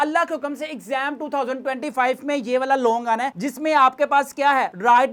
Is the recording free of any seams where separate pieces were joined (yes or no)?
yes